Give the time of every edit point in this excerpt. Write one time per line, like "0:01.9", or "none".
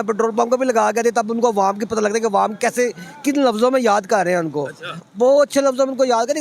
none